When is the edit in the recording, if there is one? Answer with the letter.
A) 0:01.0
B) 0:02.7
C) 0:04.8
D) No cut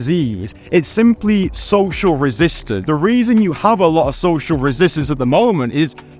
B